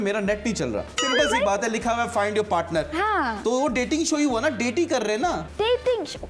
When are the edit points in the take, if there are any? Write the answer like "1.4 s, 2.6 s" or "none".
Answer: 1.0 s, 5.5 s